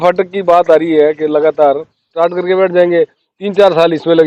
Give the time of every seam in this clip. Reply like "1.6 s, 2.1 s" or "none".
2.1 s